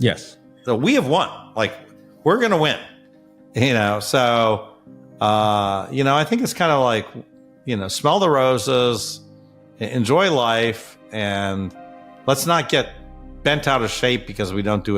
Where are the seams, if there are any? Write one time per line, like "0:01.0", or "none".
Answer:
none